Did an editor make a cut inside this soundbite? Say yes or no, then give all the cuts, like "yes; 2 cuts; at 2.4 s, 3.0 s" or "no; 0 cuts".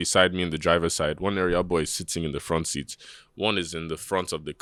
no; 0 cuts